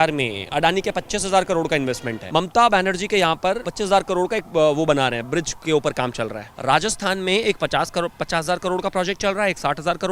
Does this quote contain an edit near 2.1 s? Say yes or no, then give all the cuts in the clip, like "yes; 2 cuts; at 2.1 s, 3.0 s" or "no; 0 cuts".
yes; 3 cuts; at 2.1 s, 3.7 s, 6.4 s